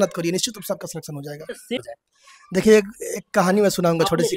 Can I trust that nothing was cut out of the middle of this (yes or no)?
no